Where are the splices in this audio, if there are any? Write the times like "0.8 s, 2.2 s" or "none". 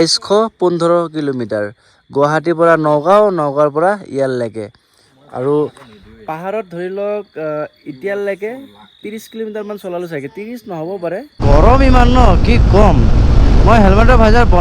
11.4 s